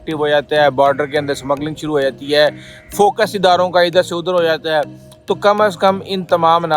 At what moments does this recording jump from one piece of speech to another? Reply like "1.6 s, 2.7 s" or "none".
none